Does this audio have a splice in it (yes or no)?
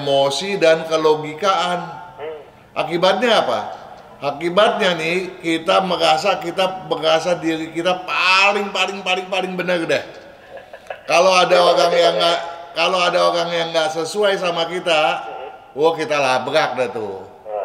no